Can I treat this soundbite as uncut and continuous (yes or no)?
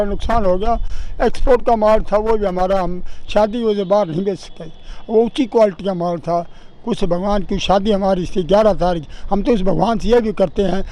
yes